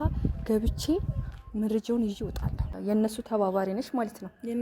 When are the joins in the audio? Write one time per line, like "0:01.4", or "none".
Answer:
0:02.7